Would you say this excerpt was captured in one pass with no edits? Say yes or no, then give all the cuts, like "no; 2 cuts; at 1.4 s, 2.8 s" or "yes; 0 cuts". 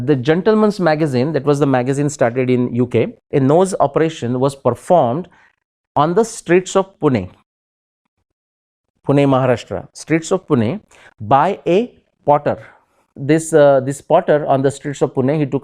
no; 2 cuts; at 3.2 s, 13.1 s